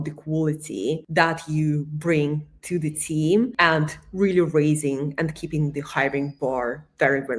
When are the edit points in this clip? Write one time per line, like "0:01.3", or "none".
none